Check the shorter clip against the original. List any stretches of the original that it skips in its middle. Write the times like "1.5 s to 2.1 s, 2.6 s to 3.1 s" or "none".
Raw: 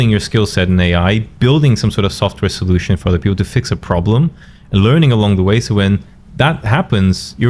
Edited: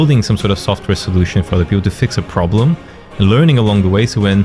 none